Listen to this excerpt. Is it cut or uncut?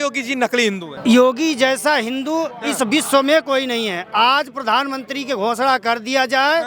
cut